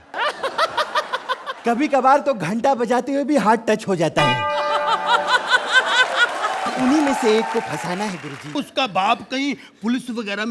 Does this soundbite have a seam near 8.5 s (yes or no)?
yes